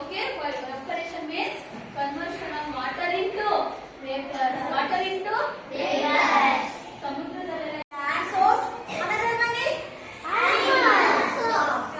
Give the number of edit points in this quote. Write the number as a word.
one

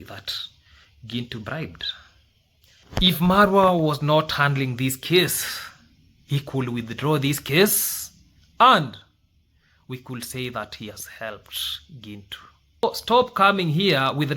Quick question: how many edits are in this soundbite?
two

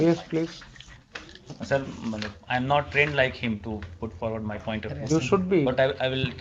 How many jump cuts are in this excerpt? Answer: zero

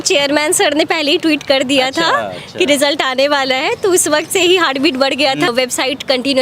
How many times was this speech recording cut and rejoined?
one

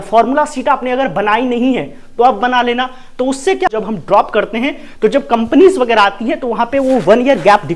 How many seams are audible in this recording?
one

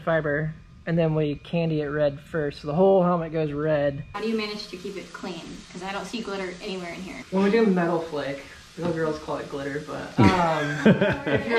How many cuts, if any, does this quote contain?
two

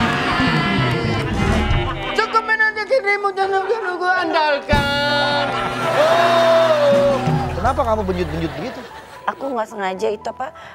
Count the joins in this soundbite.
one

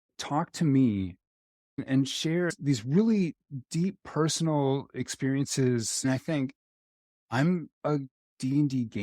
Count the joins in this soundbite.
one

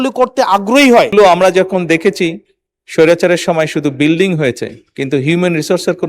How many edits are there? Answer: one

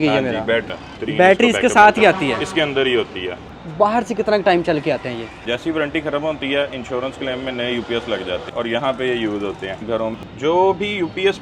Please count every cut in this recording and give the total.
five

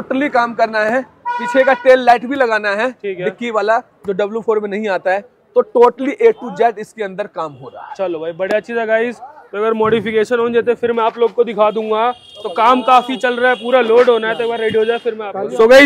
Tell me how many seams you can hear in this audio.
zero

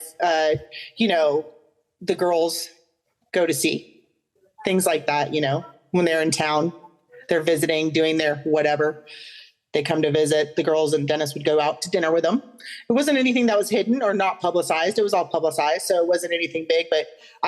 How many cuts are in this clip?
zero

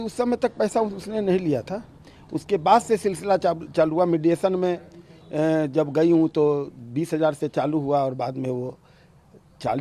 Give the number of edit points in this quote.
zero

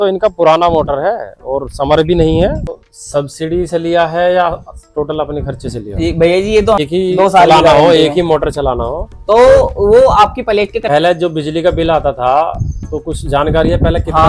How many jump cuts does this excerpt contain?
three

